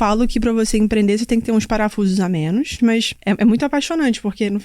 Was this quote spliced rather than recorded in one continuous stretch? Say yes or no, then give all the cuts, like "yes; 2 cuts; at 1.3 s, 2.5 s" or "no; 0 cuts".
yes; 1 cut; at 3.2 s